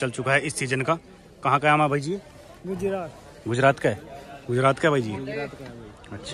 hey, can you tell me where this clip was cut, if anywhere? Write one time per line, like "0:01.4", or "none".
none